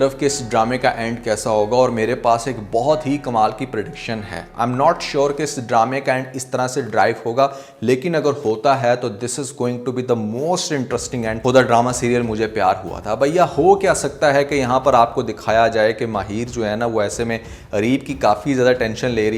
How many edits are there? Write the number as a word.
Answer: zero